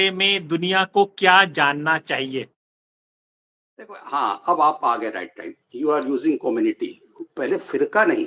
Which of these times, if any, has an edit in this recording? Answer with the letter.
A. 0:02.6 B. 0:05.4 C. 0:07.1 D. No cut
D